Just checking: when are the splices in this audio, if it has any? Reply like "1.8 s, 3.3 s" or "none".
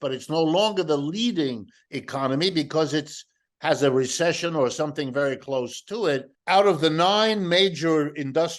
6.3 s